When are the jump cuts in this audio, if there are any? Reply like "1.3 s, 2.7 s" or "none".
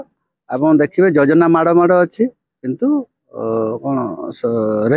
none